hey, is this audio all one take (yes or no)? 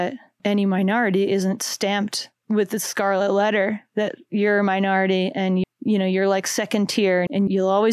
no